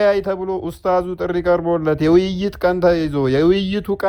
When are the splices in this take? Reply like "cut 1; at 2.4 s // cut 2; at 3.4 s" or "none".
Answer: none